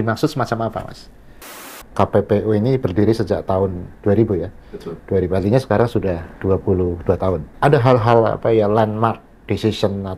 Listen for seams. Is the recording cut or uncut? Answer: cut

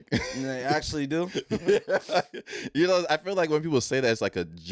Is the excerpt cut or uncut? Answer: uncut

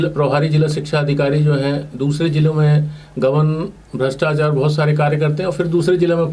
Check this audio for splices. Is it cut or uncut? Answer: uncut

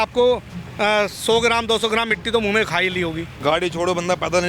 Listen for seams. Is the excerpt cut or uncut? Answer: cut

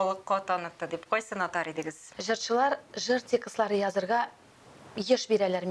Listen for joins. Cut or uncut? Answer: cut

